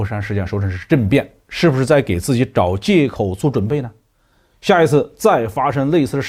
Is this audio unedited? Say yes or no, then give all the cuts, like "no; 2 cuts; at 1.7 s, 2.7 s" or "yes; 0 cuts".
yes; 0 cuts